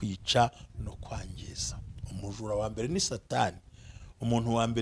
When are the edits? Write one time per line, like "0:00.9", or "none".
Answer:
none